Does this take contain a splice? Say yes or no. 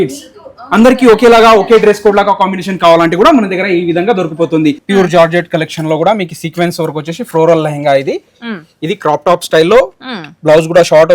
yes